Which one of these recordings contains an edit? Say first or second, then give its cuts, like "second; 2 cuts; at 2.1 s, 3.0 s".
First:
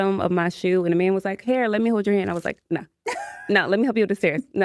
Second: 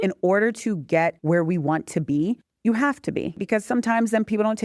second; 3 cuts; at 1.2 s, 2.5 s, 3.4 s